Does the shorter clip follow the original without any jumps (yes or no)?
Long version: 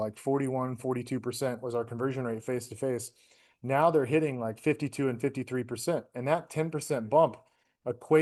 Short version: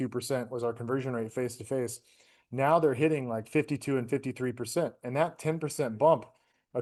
yes